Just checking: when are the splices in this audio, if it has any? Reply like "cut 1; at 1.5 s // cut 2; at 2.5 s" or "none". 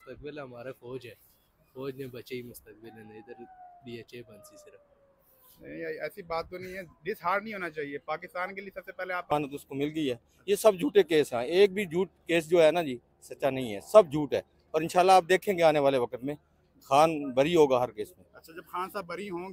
cut 1; at 6.1 s // cut 2; at 9.3 s